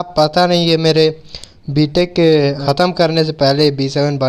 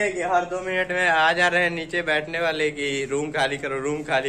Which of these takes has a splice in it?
first; 1 cut; at 2.6 s

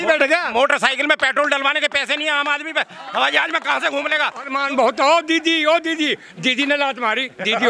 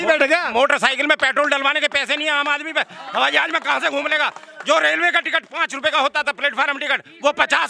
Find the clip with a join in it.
first; 1 cut; at 4.5 s

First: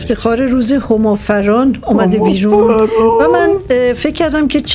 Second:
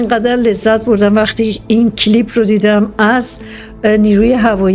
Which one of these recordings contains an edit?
second; 1 cut; at 1.7 s

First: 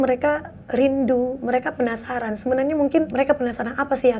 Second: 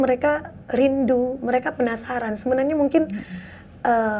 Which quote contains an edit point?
first; 1 cut; at 3.1 s

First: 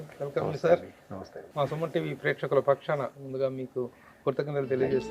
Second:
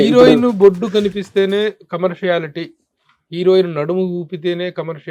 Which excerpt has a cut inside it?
first; 1 cut; at 1.4 s

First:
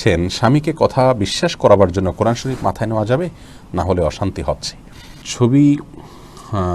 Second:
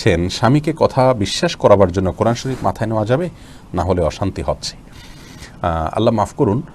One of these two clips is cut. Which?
first; 1 cut; at 5.3 s

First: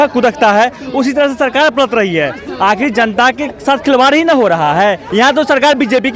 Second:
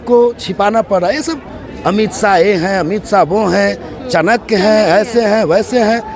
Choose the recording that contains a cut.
first; 1 cut; at 5.0 s

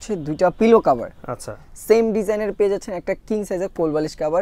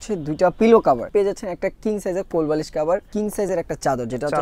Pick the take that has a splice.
second; 2 cuts; at 1.1 s, 3.1 s

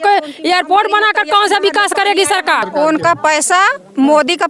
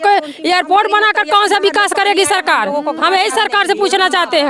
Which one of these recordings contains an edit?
first; 1 cut; at 2.6 s

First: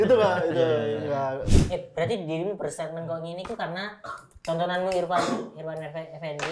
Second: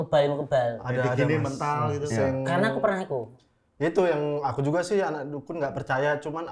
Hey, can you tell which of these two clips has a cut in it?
first; 1 cut; at 1.6 s

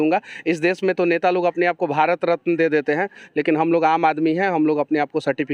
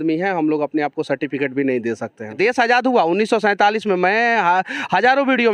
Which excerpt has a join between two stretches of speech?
second; 1 cut; at 2.3 s

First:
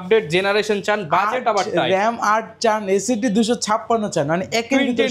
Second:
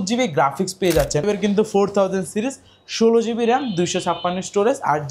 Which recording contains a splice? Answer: second; 1 cut; at 1.2 s

